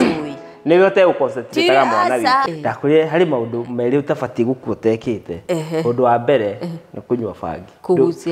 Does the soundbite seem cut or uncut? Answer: cut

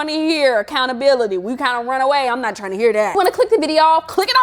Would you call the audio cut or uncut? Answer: uncut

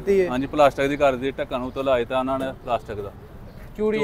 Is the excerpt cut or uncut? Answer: uncut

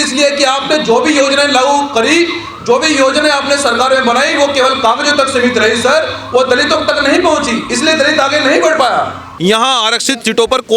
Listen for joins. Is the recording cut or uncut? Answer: cut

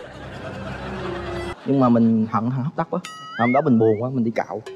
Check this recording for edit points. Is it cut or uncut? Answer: cut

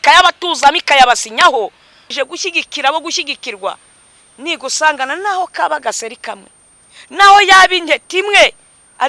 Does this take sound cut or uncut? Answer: cut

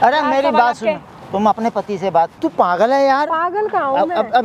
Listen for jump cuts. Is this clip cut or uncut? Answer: cut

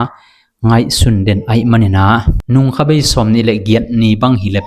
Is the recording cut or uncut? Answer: cut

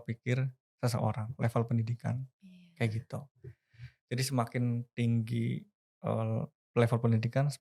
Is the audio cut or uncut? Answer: uncut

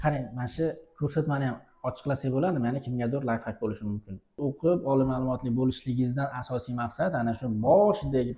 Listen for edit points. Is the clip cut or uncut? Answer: cut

